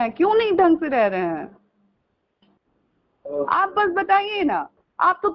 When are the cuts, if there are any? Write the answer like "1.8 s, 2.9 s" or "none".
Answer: none